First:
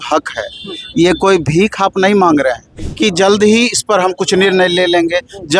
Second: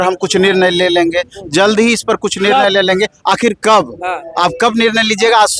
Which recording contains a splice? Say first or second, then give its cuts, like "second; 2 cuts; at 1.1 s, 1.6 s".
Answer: first; 1 cut; at 2.7 s